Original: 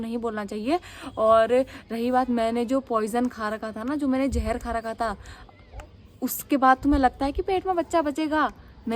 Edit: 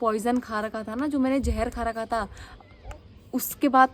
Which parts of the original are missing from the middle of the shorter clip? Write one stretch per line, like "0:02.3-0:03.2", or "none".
none